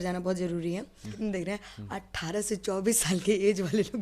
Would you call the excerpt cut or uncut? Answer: cut